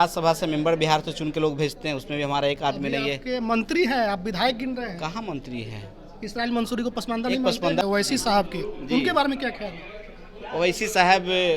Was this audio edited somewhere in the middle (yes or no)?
yes